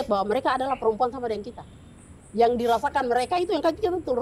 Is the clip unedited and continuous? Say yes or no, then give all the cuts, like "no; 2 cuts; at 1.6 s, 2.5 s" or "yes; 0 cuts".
yes; 0 cuts